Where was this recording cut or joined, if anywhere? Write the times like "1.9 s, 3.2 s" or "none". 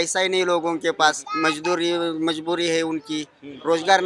1.3 s